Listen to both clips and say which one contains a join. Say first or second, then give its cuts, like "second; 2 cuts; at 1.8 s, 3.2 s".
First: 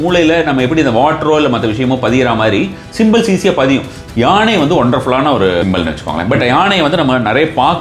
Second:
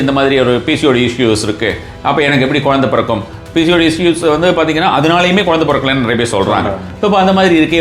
first; 2 cuts; at 4.0 s, 5.6 s